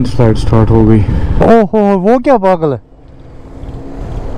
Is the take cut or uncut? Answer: cut